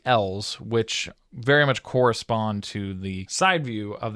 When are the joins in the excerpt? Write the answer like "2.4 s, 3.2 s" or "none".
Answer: 3.3 s